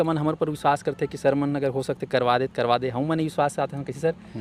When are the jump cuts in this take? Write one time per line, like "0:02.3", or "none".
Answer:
none